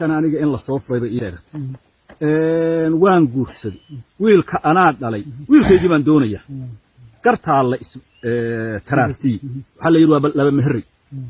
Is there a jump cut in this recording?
yes; 1 cut; at 1.3 s

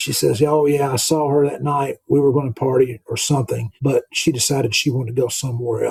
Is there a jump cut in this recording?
no; 0 cuts

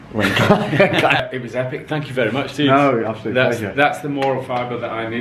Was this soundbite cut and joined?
no; 0 cuts

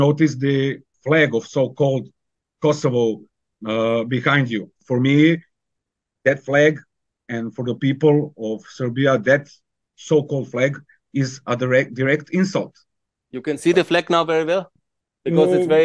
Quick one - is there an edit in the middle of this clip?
yes; 3 cuts; at 0.9 s, 4.7 s, 13.3 s

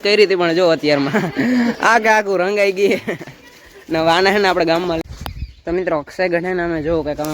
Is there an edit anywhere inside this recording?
yes; 1 cut; at 5.0 s

